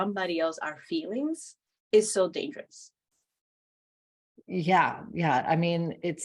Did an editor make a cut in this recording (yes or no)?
no